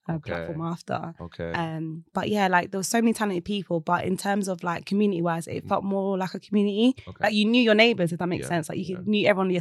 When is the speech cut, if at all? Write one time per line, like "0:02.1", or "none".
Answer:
none

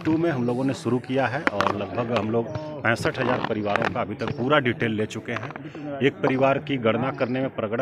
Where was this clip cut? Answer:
none

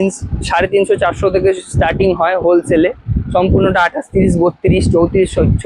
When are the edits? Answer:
none

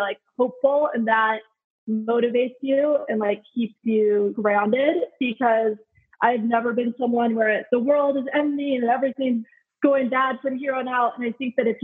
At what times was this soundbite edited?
0:04.4
0:07.6
0:09.5

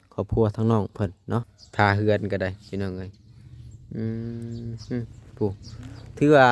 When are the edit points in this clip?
0:01.6

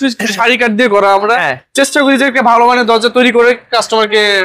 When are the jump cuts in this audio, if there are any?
none

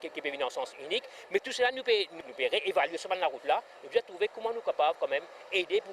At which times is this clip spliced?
none

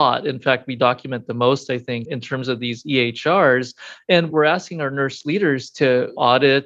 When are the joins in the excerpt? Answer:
0:02.1

